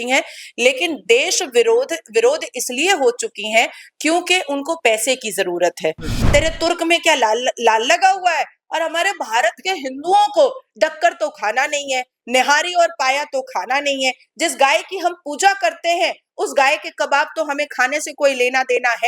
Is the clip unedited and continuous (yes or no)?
no